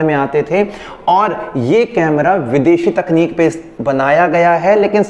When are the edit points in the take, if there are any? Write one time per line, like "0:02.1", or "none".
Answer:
none